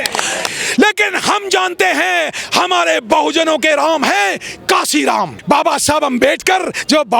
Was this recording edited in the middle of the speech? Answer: yes; 1 cut; at 5.4 s

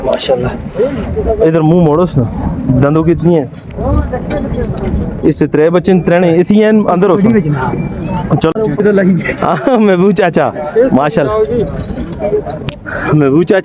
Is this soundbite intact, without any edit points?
no; 1 cut; at 8.5 s

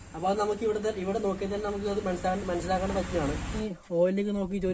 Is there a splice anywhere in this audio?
yes; 1 cut; at 3.7 s

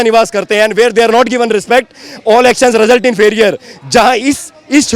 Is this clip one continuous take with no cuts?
yes; 0 cuts

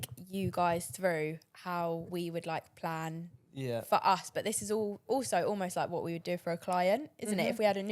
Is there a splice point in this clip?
no; 0 cuts

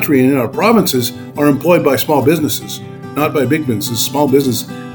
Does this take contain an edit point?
no; 0 cuts

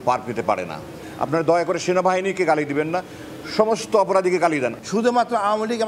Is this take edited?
no; 0 cuts

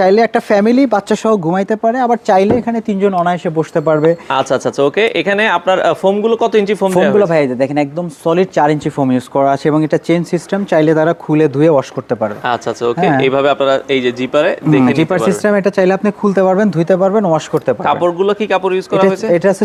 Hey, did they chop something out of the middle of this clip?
no; 0 cuts

